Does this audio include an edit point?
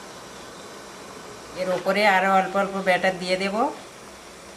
yes; 1 cut; at 1.6 s

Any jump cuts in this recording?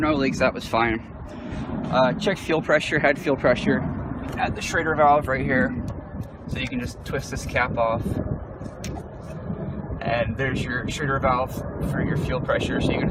yes; 1 cut; at 9.8 s

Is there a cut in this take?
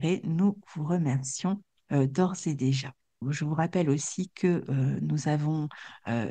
yes; 1 cut; at 3.2 s

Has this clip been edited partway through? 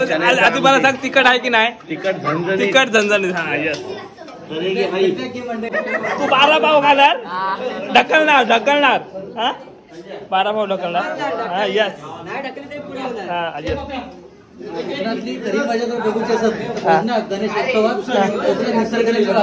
yes; 1 cut; at 5.7 s

